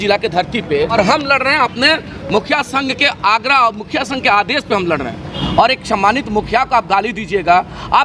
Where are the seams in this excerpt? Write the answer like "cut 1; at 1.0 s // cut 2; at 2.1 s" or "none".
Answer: cut 1; at 0.9 s // cut 2; at 5.3 s